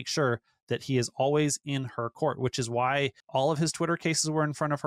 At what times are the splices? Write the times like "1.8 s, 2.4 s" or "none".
3.2 s